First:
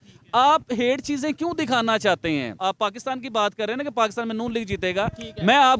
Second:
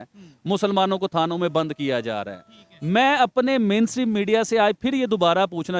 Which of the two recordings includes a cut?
first; 1 cut; at 2.5 s

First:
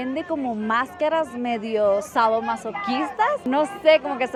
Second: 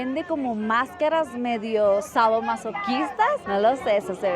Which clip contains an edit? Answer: second; 1 cut; at 3.4 s

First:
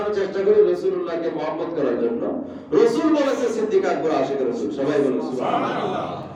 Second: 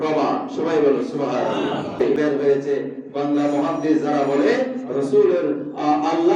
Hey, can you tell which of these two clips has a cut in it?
second; 1 cut; at 2.1 s

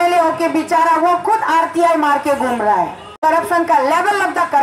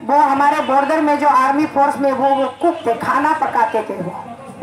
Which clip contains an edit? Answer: first; 1 cut; at 3.0 s

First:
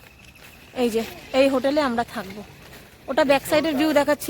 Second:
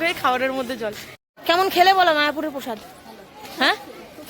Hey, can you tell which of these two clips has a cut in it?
second; 1 cut; at 1.3 s

